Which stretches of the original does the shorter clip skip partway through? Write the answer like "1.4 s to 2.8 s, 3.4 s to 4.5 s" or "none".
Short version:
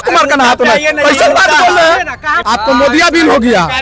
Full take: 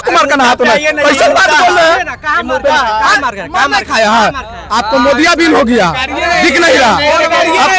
2.3 s to 4.5 s